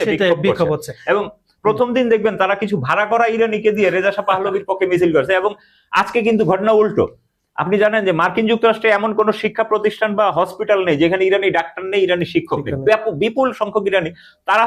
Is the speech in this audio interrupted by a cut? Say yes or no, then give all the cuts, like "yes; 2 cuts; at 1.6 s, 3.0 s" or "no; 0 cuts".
no; 0 cuts